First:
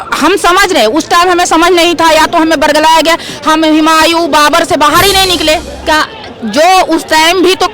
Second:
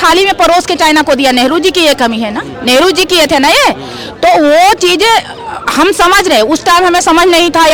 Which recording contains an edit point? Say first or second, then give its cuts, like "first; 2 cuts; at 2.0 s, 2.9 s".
first; 1 cut; at 5.7 s